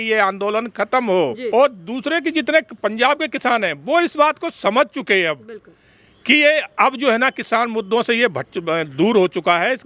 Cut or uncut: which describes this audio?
cut